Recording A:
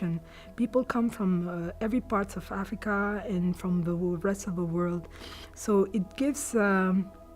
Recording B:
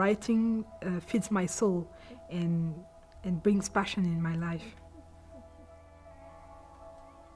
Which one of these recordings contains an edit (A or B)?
A